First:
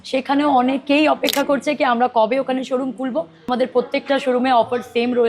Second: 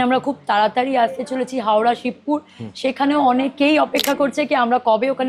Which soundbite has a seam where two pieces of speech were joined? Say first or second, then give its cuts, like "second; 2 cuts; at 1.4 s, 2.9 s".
first; 1 cut; at 3.5 s